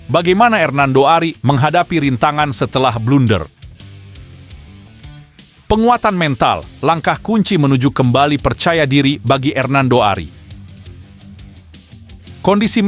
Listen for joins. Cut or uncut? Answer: cut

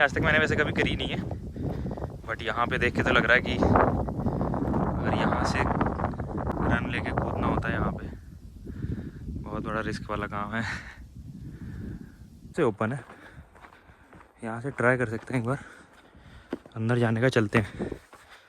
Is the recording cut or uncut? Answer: cut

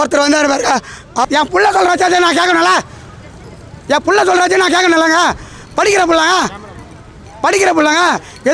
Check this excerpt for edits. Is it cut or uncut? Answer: cut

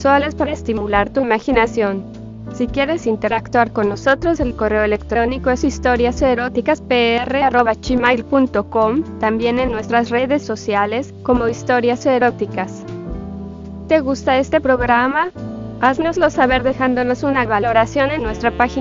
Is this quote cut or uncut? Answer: uncut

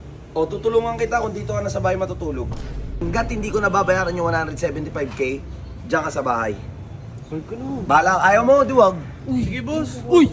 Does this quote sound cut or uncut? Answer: cut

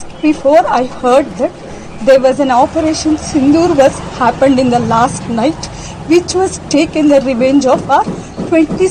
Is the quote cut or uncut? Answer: uncut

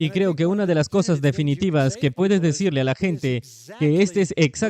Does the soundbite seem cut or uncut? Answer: uncut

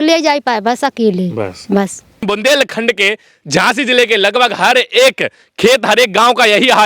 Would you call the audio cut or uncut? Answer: cut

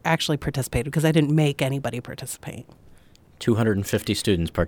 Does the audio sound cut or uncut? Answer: uncut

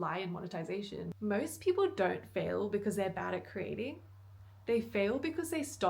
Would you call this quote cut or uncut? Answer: cut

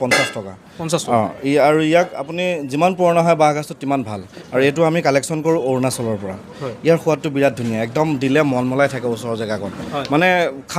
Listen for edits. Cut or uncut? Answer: uncut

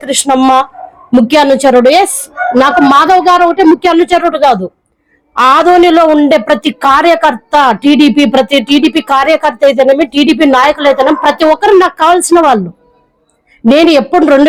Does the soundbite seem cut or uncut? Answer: uncut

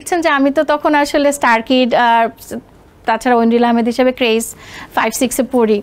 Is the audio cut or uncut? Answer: uncut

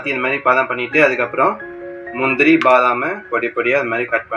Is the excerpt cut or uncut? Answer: uncut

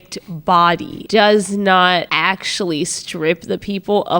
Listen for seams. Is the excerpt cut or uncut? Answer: cut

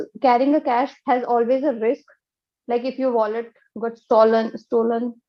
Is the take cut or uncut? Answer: uncut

